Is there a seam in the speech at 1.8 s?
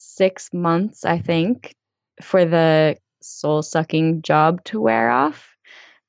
yes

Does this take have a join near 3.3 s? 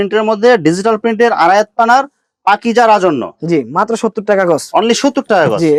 no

